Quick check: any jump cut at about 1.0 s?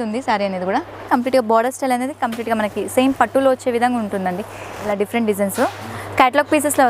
yes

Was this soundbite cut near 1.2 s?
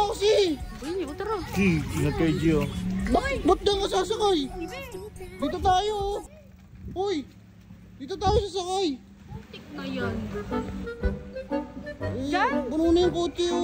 no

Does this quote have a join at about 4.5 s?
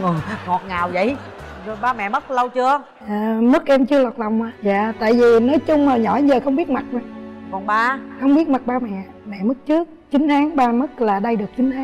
yes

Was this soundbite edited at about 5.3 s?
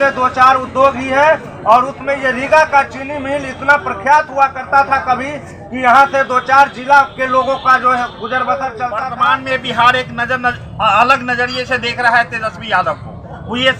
no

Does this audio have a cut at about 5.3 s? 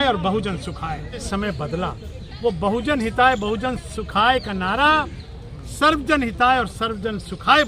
no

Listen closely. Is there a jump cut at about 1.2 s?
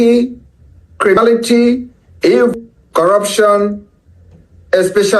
yes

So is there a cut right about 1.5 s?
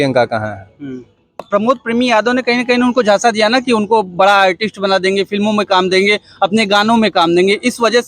yes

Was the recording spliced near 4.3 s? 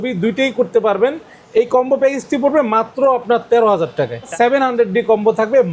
yes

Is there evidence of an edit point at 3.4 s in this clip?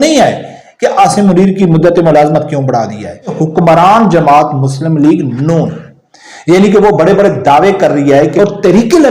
yes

